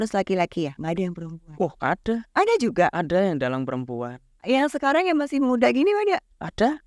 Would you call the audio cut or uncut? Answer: uncut